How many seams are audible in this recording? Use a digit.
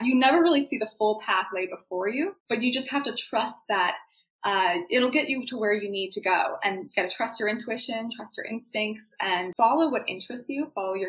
1